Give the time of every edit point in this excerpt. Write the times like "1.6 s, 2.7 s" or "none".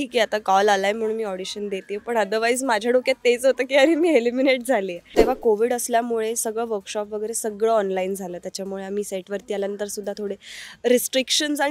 5.1 s